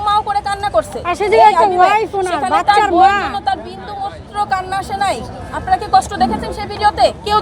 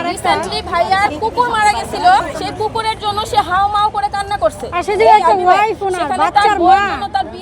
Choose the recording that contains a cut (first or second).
second